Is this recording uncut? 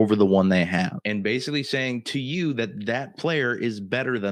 yes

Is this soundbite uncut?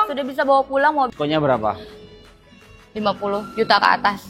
no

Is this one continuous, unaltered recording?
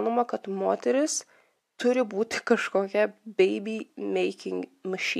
yes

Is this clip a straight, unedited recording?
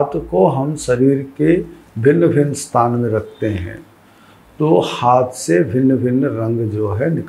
yes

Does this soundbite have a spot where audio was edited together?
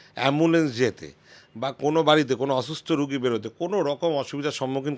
no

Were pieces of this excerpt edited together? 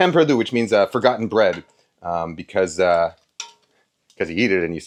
no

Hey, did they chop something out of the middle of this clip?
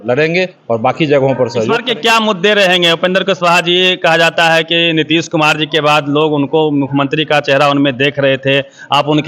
yes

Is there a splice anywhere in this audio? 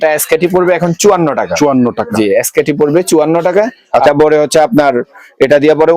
yes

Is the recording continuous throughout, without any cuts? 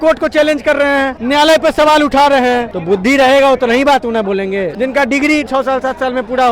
no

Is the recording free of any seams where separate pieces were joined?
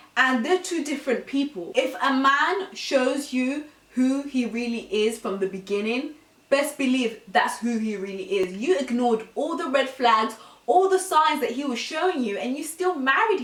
yes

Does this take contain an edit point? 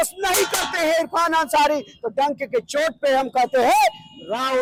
no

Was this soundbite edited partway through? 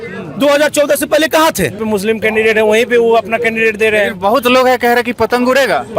yes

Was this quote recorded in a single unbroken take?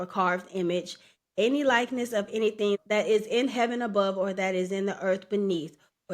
no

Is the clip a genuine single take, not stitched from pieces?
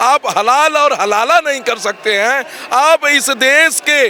yes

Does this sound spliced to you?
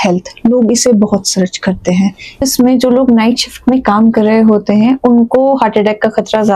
yes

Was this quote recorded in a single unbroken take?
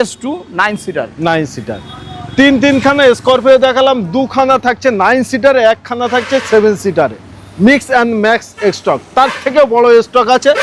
yes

